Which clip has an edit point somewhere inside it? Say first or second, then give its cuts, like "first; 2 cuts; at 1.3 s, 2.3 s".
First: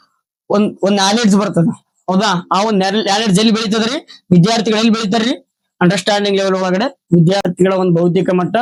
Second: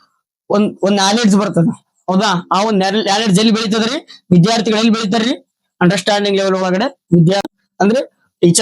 second; 1 cut; at 7.5 s